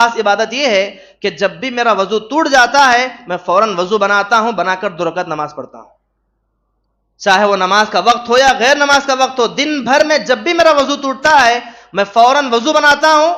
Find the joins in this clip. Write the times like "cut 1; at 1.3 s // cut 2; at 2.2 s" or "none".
none

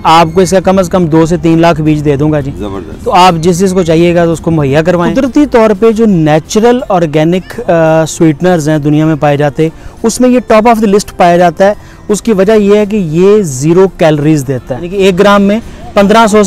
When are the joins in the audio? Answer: cut 1; at 5.1 s // cut 2; at 14.8 s

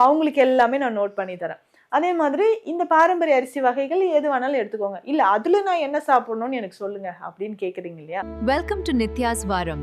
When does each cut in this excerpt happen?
cut 1; at 8.3 s

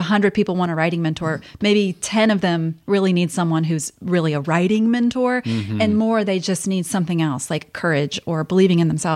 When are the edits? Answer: none

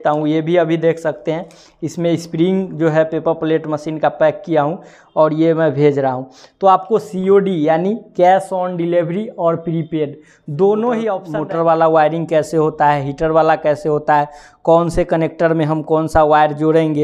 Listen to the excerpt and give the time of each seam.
cut 1; at 11.3 s

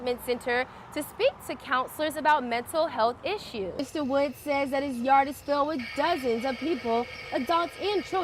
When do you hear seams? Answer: cut 1; at 3.9 s

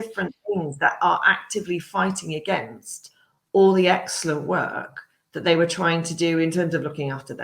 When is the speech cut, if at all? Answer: none

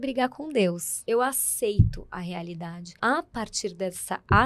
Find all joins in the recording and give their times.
cut 1; at 1.0 s // cut 2; at 2.8 s

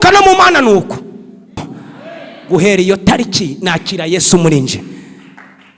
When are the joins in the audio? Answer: cut 1; at 1.7 s

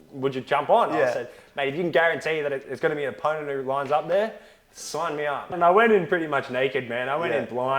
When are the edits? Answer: cut 1; at 5.5 s

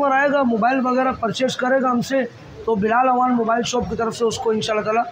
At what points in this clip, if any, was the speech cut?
none

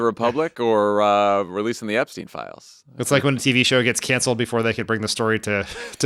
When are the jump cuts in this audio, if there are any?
none

